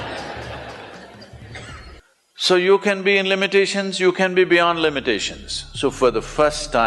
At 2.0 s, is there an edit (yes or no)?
yes